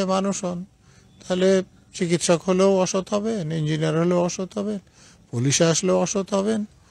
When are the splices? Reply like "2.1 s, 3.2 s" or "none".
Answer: none

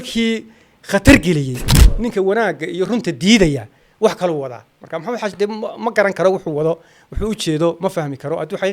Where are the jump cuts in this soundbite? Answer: 2.0 s

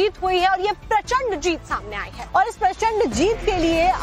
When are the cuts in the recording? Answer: 1.6 s

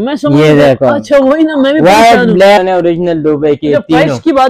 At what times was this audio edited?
2.6 s

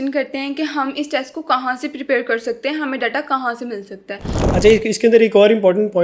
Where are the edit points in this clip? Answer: 4.4 s

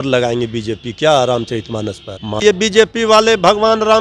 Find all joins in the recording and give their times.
2.4 s

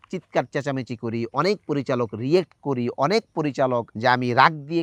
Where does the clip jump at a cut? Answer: 3.9 s

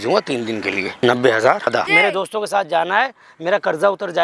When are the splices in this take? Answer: 0.9 s, 1.8 s

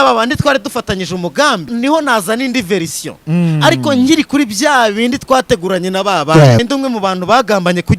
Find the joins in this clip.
1.7 s, 6.6 s

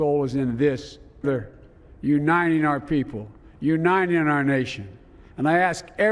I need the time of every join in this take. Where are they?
1.2 s

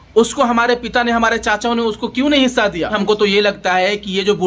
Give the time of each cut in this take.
2.9 s

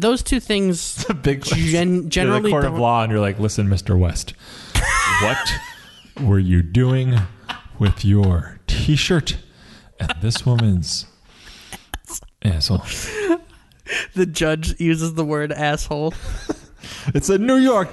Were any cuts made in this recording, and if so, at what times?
16.1 s

